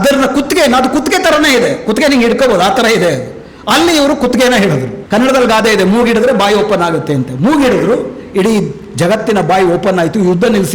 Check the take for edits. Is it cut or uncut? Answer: cut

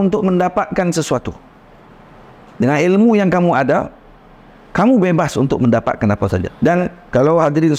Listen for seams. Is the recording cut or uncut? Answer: uncut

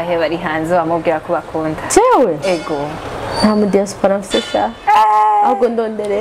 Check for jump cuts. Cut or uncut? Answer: uncut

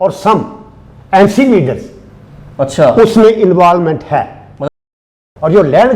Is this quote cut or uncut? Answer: cut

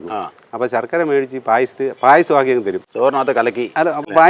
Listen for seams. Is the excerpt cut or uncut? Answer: uncut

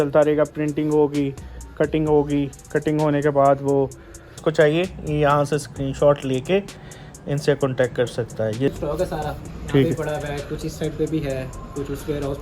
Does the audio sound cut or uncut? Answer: cut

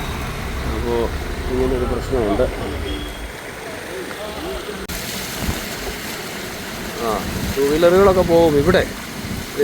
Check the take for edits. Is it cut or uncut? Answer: cut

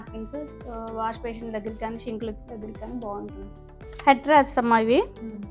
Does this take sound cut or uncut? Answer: cut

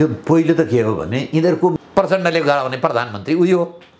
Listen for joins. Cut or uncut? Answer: cut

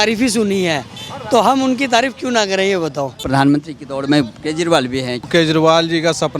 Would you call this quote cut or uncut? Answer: cut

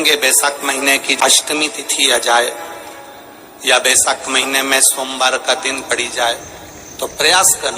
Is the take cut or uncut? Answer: cut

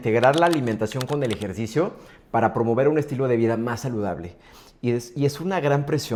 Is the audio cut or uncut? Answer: uncut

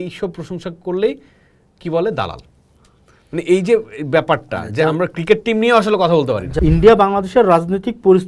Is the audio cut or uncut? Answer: cut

